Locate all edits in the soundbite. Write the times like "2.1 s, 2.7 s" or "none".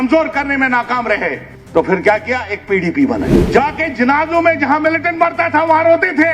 1.5 s, 3.4 s